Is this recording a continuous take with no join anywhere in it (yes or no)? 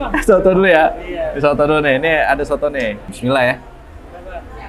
no